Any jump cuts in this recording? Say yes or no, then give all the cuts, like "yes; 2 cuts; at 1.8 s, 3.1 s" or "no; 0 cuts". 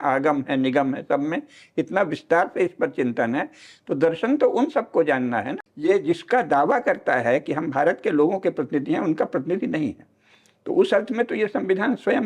yes; 1 cut; at 5.6 s